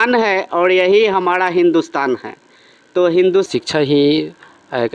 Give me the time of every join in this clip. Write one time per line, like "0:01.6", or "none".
0:03.5